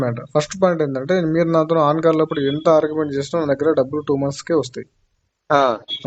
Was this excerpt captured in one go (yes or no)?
yes